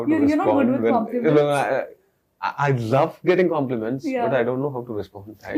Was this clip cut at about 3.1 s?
no; 0 cuts

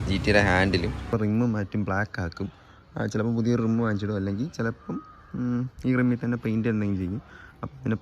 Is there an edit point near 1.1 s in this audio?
yes; 1 cut; at 1.1 s

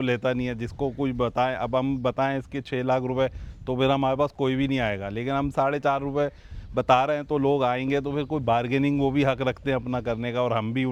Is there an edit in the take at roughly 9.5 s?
no; 0 cuts

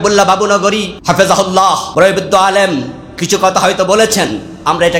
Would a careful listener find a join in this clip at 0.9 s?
yes; 2 cuts; at 0.9 s, 1.9 s

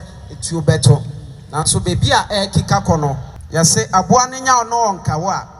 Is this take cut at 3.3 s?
yes; 1 cut; at 3.3 s

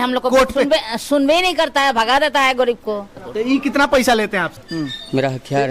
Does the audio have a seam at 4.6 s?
yes; 2 cuts; at 3.2 s, 4.6 s

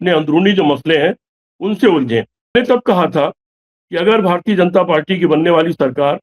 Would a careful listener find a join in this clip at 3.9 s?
no; 1 cut; at 2.5 s

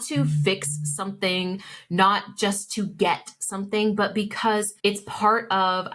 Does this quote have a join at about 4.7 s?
yes; 1 cut; at 4.7 s

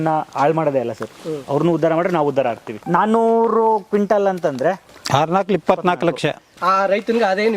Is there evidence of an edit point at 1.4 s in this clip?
no; 3 cuts; at 2.8 s, 4.9 s, 6.5 s

